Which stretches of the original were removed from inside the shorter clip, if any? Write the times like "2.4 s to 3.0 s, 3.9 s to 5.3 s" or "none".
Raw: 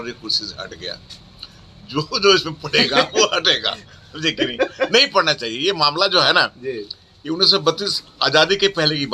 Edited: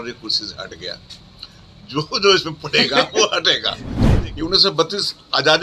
4.0 s to 6.9 s